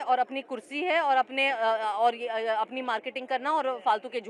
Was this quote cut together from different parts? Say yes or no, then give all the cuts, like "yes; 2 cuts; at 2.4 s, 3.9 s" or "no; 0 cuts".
no; 0 cuts